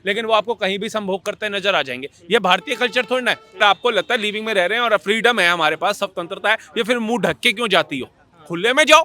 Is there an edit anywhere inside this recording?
yes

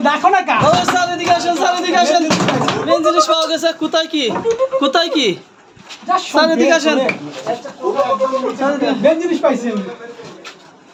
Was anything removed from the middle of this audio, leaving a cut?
no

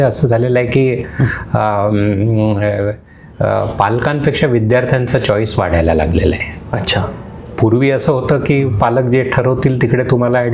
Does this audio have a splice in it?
no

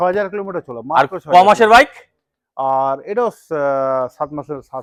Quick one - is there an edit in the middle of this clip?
no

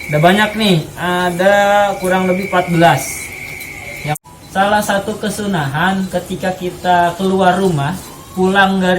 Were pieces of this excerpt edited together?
yes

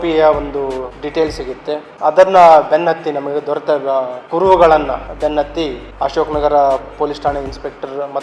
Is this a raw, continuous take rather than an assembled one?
no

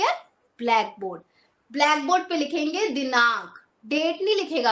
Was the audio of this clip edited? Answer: no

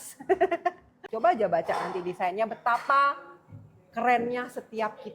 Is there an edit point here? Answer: yes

